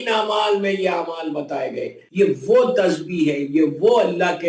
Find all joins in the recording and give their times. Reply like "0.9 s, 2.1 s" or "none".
2.0 s